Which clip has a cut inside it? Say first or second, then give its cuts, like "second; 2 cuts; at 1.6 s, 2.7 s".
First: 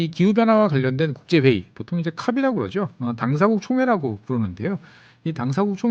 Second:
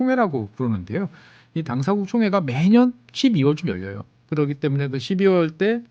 second; 1 cut; at 4.2 s